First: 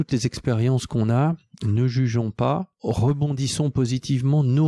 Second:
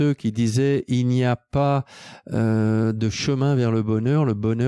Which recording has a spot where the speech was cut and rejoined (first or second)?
first